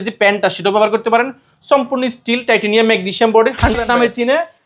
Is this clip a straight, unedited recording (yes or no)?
no